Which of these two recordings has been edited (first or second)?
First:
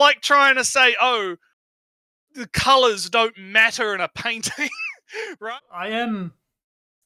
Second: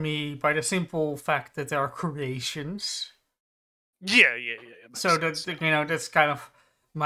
first